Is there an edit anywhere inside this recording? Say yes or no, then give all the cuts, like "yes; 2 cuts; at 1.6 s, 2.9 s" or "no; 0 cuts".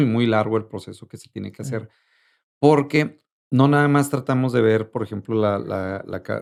no; 0 cuts